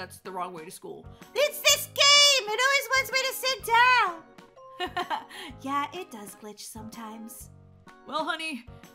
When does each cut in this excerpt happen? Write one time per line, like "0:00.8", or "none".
none